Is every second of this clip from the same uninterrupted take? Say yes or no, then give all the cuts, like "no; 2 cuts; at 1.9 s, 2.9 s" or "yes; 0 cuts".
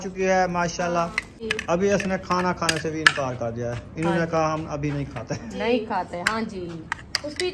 no; 1 cut; at 1.4 s